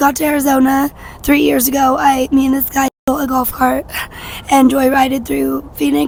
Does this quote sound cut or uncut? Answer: uncut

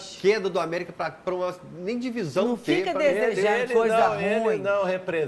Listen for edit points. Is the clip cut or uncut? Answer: uncut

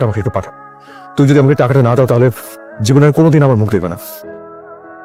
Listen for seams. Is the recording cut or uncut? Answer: uncut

